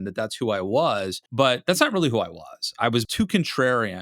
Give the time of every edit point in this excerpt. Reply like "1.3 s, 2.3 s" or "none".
1.2 s, 3.0 s